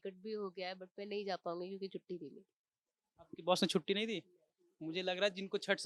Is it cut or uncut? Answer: uncut